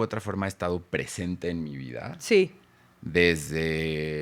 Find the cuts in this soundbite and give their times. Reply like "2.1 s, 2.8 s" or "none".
none